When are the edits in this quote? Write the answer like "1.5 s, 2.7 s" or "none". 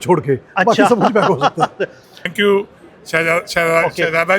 2.2 s